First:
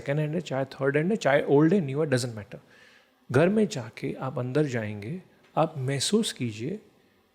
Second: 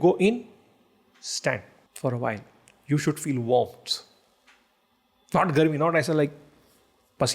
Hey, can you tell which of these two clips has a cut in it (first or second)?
second